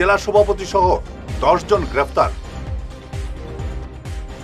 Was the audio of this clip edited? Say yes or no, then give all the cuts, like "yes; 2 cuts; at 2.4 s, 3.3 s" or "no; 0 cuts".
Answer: yes; 1 cut; at 2.4 s